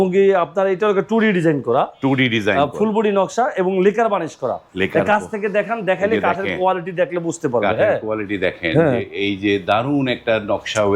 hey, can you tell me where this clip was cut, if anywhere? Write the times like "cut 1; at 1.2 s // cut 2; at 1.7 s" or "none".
none